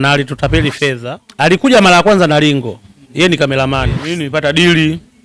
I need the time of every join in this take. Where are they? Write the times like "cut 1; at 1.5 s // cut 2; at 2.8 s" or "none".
cut 1; at 1.0 s // cut 2; at 4.2 s